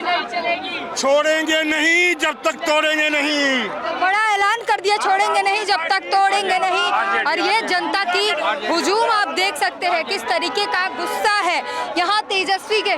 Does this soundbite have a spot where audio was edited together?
no; 0 cuts

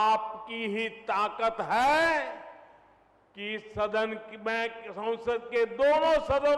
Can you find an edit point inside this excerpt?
no; 0 cuts

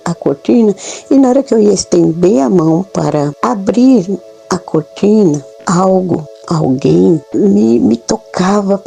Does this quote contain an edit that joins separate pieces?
yes; 4 cuts; at 3.3 s, 5.5 s, 6.3 s, 7.3 s

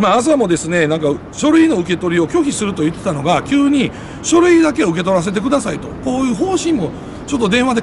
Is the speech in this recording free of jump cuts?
yes; 0 cuts

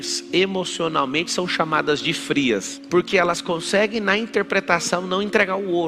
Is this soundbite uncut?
no; 1 cut; at 2.8 s

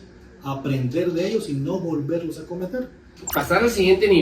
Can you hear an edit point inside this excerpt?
yes; 1 cut; at 3.1 s

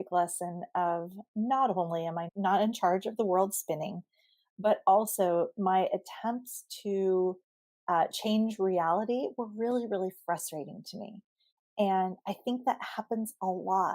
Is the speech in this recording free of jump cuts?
no; 1 cut; at 2.3 s

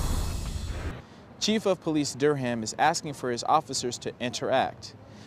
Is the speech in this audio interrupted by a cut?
yes; 1 cut; at 0.9 s

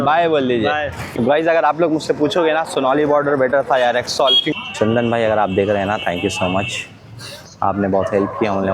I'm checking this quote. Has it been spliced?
yes; 2 cuts; at 1.0 s, 4.5 s

